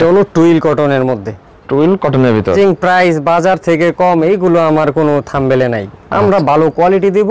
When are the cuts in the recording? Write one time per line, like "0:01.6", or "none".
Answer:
0:02.5